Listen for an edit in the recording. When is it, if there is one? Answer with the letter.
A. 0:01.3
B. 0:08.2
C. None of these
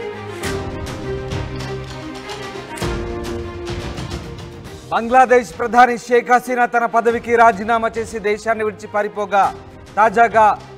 A